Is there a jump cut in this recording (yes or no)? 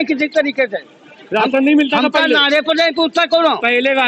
no